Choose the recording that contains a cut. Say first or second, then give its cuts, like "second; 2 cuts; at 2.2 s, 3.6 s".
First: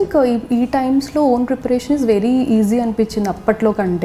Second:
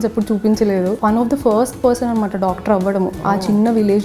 second; 2 cuts; at 1.0 s, 3.2 s